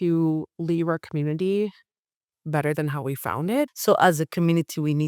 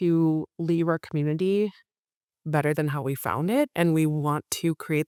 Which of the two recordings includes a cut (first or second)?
first